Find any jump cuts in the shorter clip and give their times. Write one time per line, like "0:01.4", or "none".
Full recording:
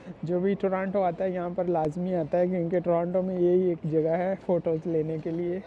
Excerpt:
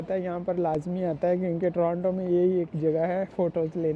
none